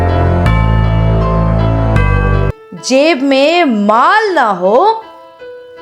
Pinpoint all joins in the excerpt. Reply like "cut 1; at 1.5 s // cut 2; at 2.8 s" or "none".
cut 1; at 1.0 s